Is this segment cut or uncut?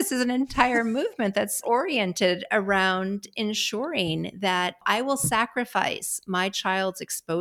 cut